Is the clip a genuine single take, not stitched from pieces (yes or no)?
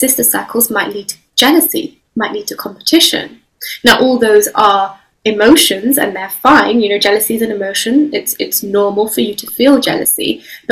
yes